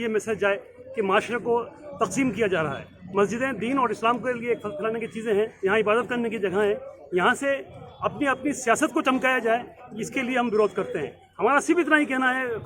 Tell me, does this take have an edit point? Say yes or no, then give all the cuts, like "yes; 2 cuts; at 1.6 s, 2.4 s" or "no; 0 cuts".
no; 0 cuts